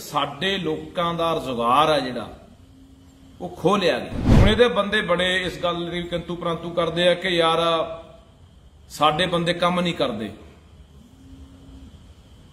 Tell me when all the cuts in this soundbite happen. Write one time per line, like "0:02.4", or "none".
0:04.2

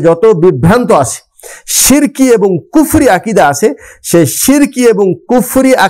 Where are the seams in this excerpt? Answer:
none

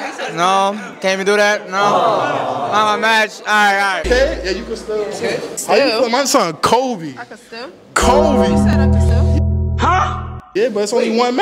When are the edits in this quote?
0:04.0
0:05.5

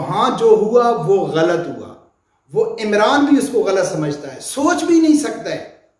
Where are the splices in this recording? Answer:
none

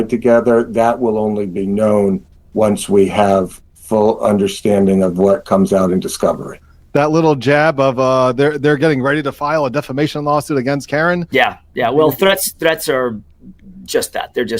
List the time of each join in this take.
none

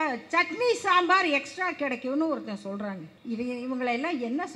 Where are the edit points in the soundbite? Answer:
0:03.1

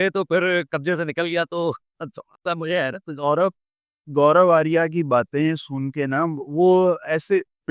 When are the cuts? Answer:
none

